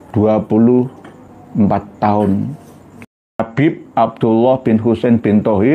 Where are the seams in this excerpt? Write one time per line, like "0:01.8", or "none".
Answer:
0:03.3

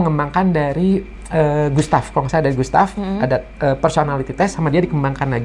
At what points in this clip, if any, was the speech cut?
none

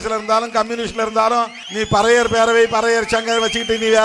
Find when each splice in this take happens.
0:01.6

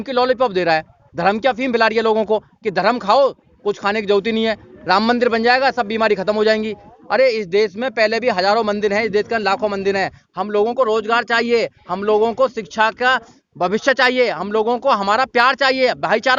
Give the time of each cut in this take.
none

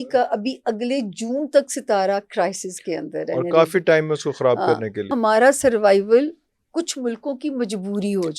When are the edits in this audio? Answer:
0:05.1

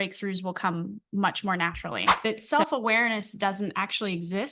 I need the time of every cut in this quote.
0:02.1

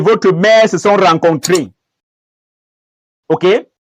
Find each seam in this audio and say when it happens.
none

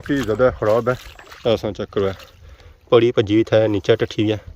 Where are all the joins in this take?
0:01.1

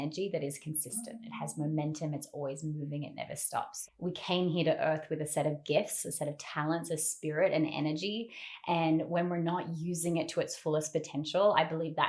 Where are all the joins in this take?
0:03.7

